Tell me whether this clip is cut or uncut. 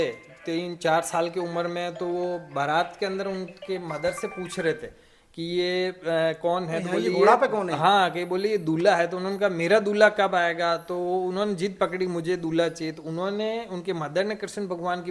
uncut